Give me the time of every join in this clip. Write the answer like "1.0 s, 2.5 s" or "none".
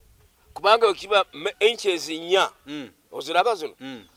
none